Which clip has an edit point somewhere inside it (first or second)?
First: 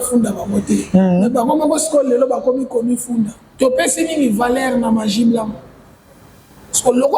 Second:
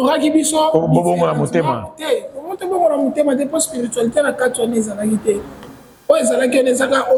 first